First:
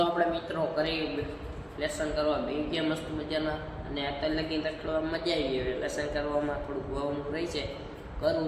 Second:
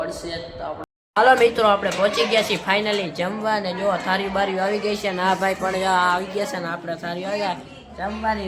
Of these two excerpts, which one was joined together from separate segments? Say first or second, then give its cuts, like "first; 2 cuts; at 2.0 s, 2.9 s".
second; 1 cut; at 1.0 s